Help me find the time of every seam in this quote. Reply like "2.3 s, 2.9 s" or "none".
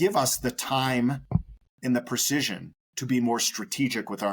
none